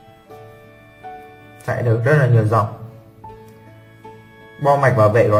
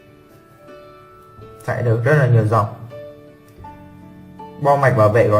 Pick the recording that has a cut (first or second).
second